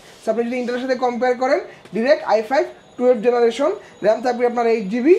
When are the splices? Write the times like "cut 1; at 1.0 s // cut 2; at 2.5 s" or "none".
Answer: none